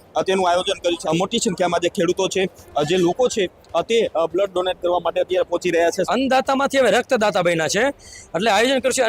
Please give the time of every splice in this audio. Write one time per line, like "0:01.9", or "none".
0:01.0
0:06.1

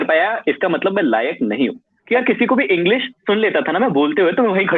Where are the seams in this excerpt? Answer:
0:01.9

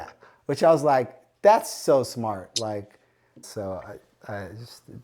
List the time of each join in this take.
0:03.5

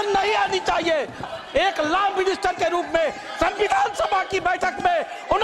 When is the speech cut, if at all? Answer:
0:01.3

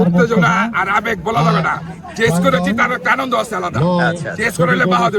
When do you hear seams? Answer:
none

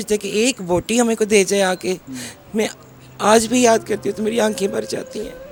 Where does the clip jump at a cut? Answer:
none

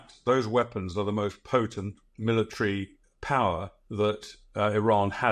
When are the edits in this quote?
0:02.1
0:04.1

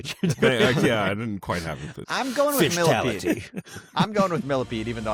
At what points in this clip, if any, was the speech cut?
none

